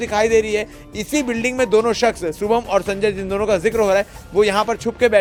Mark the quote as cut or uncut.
uncut